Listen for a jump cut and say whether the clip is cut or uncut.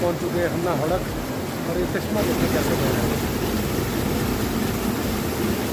uncut